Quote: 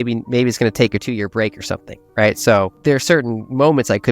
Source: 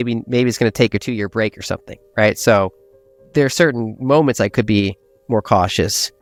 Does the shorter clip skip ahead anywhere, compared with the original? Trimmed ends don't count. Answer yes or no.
yes